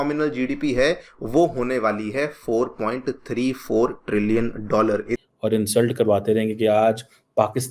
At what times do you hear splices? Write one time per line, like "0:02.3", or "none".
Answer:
0:05.2